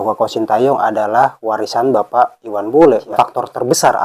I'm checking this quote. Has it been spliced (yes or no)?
yes